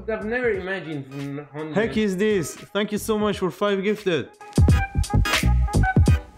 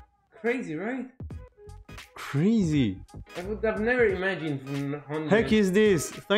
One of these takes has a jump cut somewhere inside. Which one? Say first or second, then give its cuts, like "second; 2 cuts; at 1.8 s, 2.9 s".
first; 1 cut; at 4.4 s